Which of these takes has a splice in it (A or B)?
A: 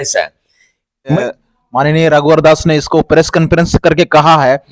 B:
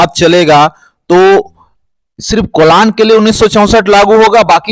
A